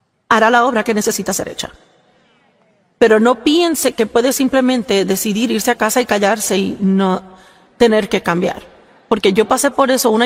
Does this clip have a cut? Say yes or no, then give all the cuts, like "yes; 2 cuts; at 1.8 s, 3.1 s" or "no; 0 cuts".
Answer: no; 0 cuts